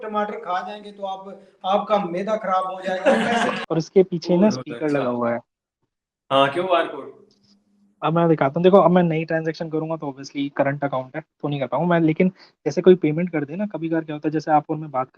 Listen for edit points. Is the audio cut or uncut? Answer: cut